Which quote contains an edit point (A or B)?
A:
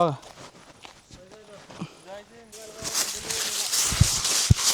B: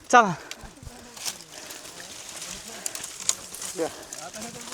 A